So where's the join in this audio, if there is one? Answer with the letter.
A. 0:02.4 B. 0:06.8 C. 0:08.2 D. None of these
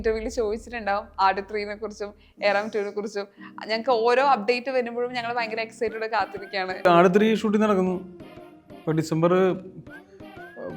B